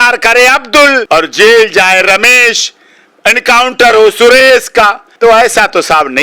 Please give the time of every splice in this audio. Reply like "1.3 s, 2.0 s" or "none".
1.0 s, 5.1 s